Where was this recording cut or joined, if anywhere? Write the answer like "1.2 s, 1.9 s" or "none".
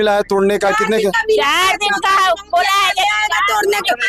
none